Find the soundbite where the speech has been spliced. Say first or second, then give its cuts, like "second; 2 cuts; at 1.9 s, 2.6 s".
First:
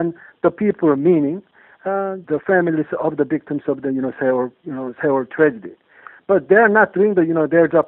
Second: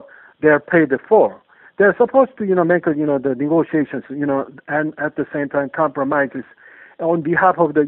first; 1 cut; at 2.2 s